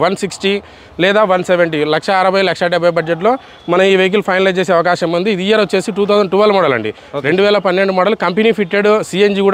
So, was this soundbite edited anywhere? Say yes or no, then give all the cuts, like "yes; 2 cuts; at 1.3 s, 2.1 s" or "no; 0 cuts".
no; 0 cuts